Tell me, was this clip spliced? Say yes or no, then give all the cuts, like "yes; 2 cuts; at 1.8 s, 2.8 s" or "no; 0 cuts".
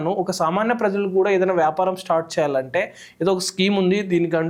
no; 0 cuts